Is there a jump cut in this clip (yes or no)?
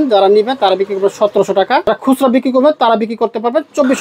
yes